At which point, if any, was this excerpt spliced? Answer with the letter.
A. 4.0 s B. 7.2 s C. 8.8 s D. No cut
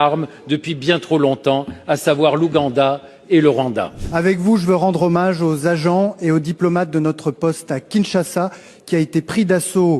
A